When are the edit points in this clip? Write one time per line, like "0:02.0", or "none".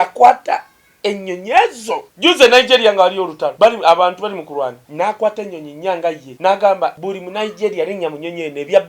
0:02.1
0:03.4
0:04.8
0:06.3
0:07.0